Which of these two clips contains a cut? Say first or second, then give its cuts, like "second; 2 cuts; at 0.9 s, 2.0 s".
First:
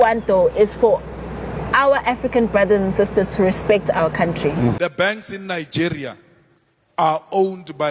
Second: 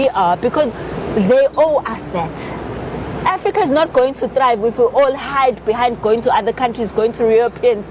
first; 1 cut; at 4.8 s